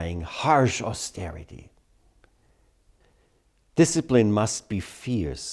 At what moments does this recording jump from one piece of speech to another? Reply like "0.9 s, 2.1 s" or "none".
3.0 s